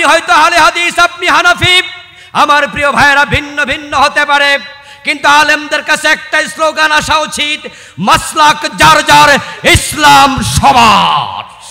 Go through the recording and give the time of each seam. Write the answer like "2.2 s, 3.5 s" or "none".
none